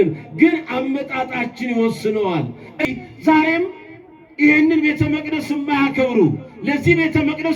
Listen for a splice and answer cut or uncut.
cut